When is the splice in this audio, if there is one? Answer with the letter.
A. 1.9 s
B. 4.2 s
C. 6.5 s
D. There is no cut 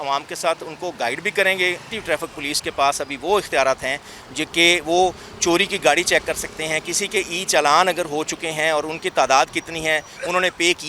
A